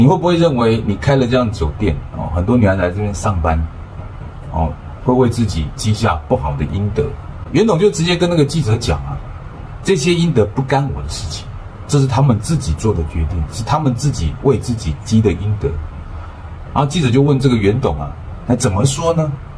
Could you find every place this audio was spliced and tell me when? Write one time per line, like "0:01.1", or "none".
none